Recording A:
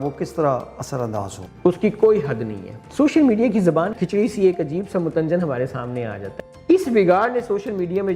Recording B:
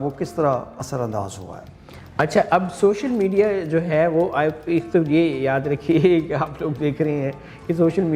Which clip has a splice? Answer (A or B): A